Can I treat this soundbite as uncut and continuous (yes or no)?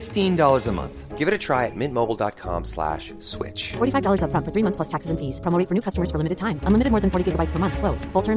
yes